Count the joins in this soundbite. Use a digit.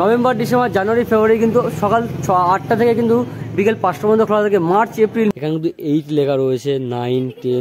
1